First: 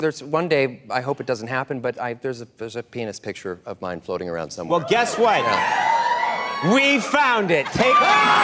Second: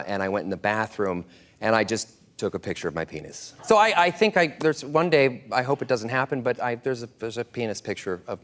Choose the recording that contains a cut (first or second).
second